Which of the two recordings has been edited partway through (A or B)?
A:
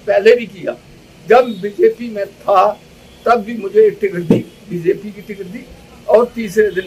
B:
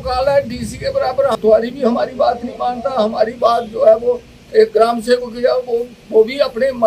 B